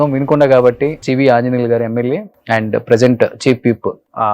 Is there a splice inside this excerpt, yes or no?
yes